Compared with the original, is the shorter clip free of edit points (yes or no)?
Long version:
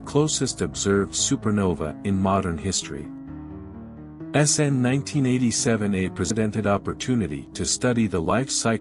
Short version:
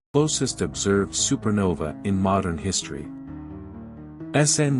yes